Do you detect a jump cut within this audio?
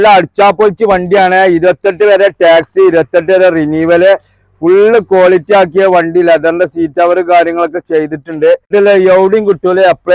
yes; 1 cut; at 8.7 s

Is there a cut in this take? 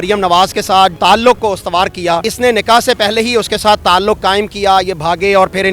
yes; 2 cuts; at 0.9 s, 2.2 s

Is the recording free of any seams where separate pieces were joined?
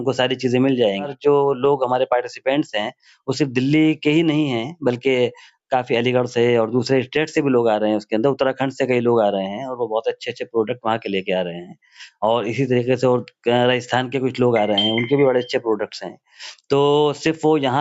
no; 1 cut; at 1.1 s

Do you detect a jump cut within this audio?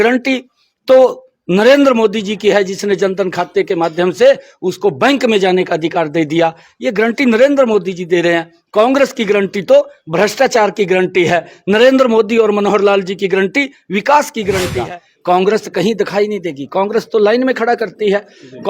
yes; 1 cut; at 14.7 s

